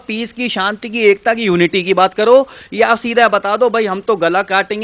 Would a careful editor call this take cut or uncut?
uncut